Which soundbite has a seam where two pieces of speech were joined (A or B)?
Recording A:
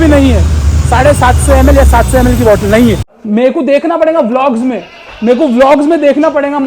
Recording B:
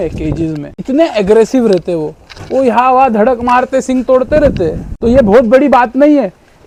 A